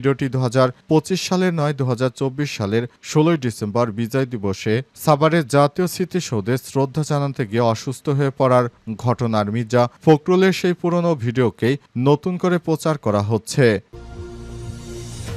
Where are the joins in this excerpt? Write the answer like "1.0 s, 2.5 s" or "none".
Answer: 13.9 s